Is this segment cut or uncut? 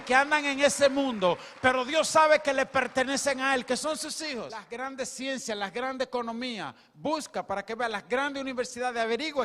cut